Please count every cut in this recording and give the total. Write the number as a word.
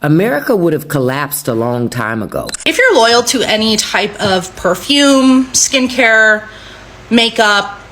one